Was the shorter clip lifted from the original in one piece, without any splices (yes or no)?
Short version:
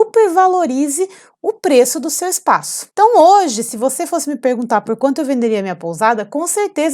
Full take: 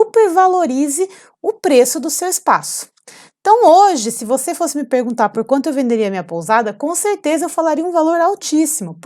no